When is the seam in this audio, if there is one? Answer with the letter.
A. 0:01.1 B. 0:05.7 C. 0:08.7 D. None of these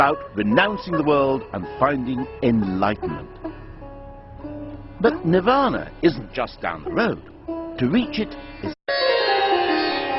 D